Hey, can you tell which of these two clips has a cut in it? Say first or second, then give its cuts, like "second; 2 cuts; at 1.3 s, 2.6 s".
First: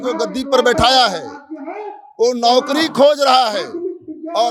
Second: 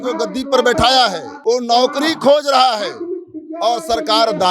second; 1 cut; at 1.3 s